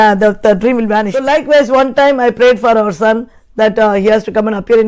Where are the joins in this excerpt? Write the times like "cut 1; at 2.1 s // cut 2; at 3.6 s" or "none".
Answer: cut 1; at 1.1 s